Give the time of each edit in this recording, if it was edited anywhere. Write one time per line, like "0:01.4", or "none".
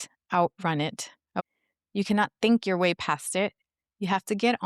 0:01.4